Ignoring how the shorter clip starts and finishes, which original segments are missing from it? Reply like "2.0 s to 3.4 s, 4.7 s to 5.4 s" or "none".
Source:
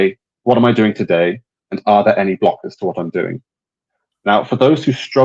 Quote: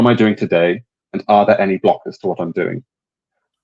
none